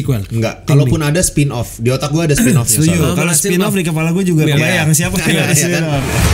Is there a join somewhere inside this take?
no; 0 cuts

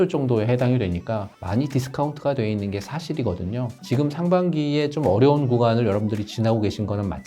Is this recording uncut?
no; 2 cuts; at 1.3 s, 3.8 s

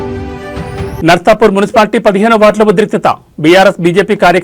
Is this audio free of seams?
no; 1 cut; at 1.0 s

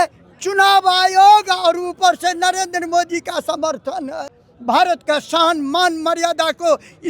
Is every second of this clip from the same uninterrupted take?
no; 1 cut; at 4.4 s

